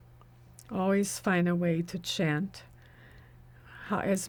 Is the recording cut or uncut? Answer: uncut